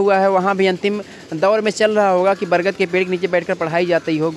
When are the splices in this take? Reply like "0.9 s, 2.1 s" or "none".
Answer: none

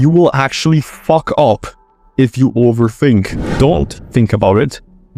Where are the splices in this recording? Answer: 3.4 s

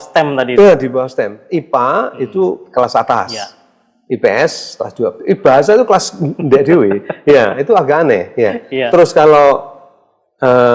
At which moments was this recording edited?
none

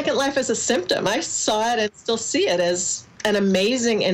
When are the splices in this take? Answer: none

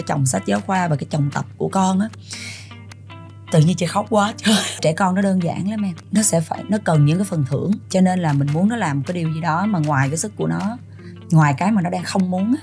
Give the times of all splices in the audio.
4.8 s, 6.0 s, 7.8 s

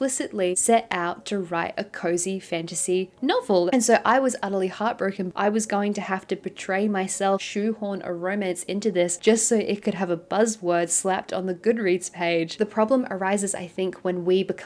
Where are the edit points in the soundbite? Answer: 3.7 s, 5.2 s, 7.5 s, 12.5 s

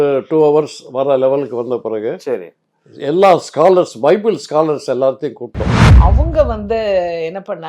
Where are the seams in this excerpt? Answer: 5.8 s

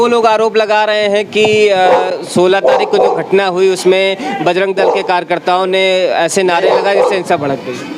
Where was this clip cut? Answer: none

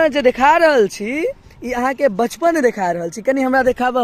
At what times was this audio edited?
none

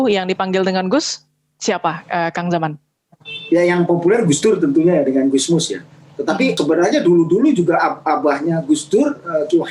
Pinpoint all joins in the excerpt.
6.5 s

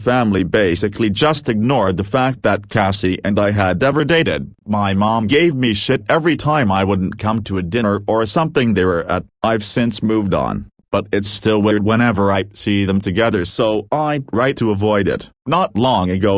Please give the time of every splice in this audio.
15.3 s

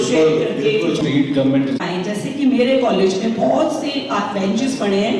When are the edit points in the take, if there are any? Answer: 1.0 s

